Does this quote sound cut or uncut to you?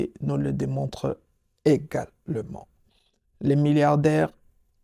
uncut